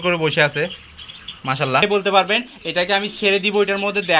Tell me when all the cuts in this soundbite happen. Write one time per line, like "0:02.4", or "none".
0:01.8